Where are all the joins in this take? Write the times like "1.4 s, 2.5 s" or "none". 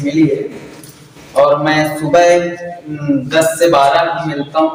none